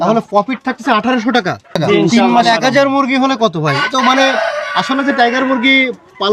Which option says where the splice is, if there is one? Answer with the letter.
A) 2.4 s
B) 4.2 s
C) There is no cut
A